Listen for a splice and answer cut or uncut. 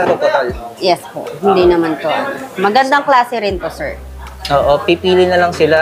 uncut